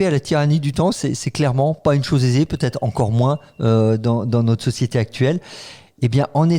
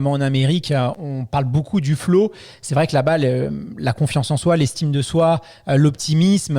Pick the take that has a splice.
second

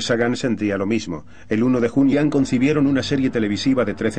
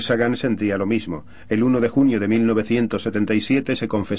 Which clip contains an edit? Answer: second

